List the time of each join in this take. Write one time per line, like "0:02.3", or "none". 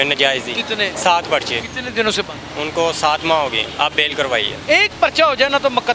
0:00.9
0:01.7
0:02.4
0:03.7
0:04.6